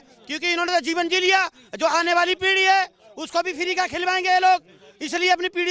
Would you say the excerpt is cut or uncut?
uncut